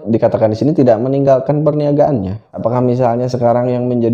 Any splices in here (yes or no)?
yes